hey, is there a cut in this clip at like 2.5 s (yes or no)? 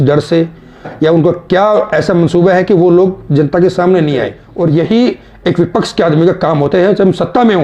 no